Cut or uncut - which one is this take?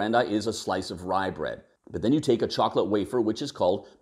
cut